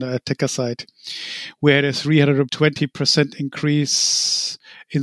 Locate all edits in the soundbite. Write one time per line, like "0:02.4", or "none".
0:02.5